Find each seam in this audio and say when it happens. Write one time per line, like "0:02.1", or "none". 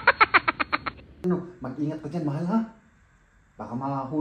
0:01.2